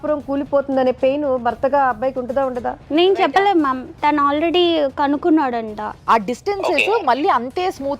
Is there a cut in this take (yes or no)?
yes